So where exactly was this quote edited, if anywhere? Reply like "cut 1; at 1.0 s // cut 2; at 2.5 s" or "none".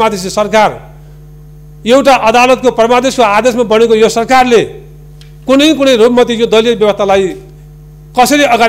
none